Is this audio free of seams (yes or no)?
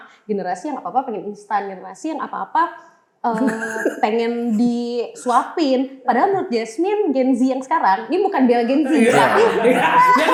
yes